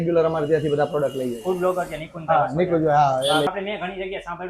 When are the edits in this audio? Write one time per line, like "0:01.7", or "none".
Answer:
0:03.5